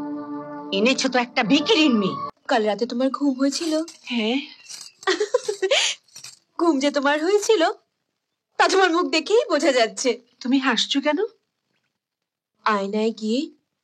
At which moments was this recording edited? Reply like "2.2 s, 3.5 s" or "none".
2.3 s